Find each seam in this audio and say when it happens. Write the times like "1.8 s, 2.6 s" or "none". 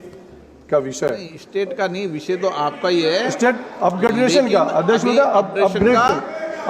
1.3 s